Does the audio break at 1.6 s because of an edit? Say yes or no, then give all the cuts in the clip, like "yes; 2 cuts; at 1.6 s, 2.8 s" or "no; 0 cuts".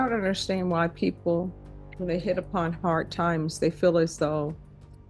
no; 0 cuts